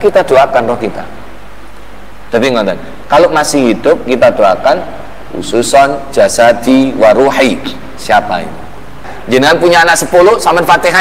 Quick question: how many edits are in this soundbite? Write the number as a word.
one